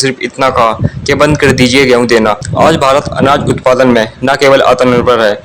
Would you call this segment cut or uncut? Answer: cut